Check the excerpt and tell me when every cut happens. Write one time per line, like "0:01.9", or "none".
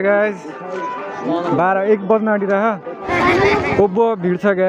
0:03.0